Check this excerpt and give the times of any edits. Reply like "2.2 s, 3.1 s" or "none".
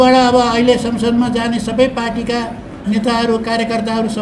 none